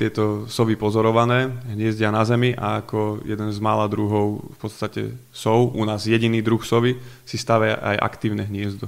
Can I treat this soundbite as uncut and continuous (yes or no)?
yes